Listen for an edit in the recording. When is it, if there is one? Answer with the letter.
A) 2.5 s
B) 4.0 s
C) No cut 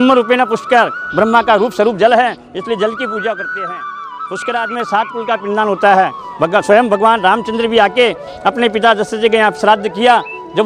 B